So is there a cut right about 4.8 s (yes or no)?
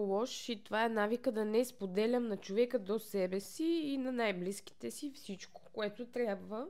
no